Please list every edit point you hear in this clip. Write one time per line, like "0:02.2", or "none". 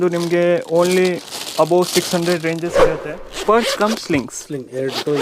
0:02.8